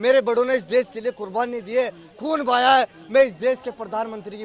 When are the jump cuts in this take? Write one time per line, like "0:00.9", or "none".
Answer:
none